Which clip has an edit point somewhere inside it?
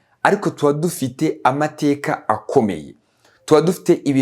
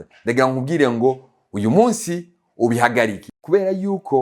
second; 1 cut; at 3.3 s

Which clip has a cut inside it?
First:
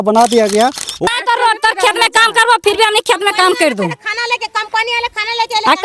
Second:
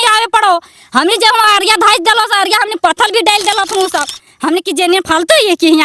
first; 1 cut; at 1.0 s

